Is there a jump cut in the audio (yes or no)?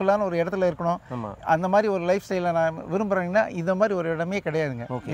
no